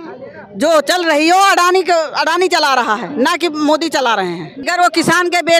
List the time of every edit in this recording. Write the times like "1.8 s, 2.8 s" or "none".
4.6 s